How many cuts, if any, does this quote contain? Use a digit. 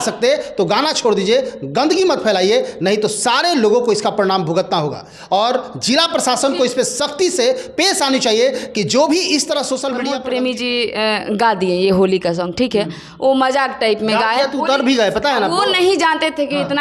1